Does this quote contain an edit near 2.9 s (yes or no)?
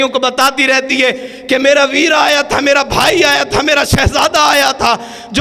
no